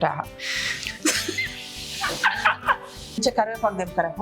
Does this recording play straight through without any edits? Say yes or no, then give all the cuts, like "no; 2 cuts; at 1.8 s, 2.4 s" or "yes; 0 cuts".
no; 1 cut; at 3.2 s